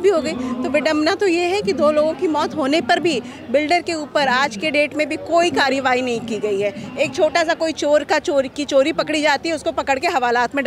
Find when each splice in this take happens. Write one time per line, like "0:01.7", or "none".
none